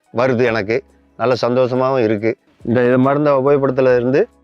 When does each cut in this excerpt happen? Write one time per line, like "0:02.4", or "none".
0:02.5